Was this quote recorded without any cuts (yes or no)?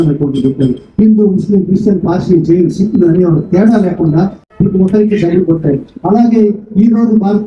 yes